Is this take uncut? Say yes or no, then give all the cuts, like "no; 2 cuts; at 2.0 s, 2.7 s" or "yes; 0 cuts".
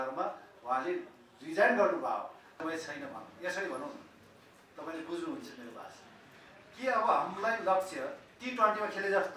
no; 1 cut; at 2.5 s